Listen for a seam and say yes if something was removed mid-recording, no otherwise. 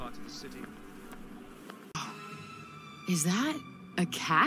yes